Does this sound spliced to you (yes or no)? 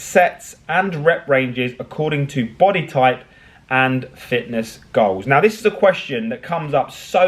no